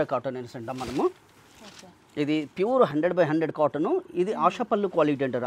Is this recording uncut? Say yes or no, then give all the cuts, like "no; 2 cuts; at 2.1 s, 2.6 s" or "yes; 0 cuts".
yes; 0 cuts